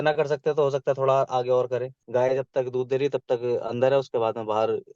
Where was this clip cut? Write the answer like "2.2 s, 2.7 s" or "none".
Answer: 2.0 s